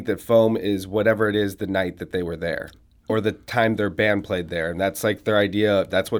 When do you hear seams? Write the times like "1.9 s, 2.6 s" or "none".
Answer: 3.1 s